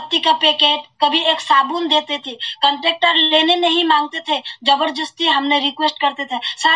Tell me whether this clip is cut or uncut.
uncut